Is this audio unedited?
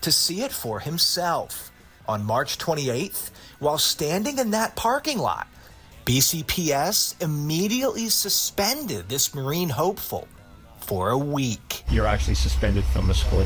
yes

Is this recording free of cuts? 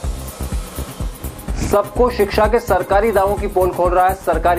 yes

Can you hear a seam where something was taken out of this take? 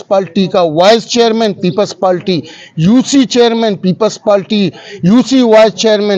no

